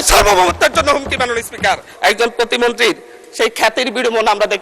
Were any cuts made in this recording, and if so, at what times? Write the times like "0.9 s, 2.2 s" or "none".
1.9 s